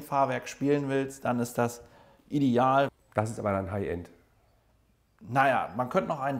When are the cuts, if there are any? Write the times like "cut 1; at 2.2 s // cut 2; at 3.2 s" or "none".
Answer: cut 1; at 2.9 s